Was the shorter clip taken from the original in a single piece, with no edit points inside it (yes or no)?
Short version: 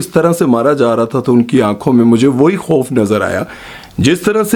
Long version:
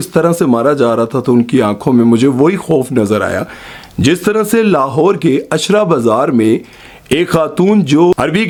yes